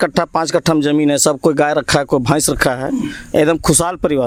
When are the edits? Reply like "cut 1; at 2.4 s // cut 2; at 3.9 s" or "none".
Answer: none

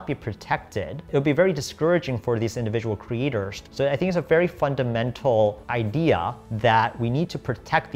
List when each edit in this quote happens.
cut 1; at 1.0 s // cut 2; at 3.6 s // cut 3; at 6.4 s

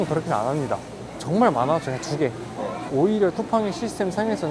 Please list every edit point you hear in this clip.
none

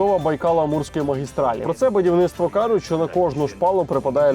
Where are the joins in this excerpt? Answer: cut 1; at 1.6 s

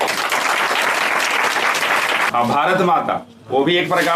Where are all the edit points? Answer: cut 1; at 2.3 s

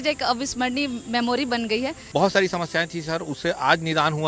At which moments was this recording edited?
cut 1; at 2.0 s

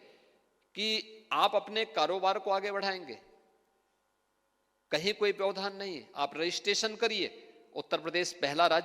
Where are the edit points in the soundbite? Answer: none

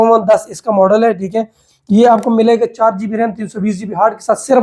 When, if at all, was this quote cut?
none

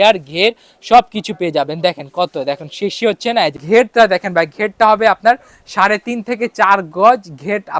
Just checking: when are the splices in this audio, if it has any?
cut 1; at 3.6 s

